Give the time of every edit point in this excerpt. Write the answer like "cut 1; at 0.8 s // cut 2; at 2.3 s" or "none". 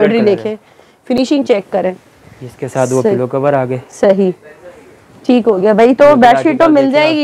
none